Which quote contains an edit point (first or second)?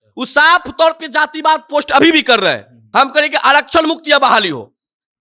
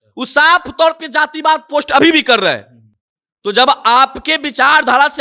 first